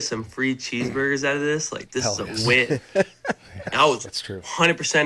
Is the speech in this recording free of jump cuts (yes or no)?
yes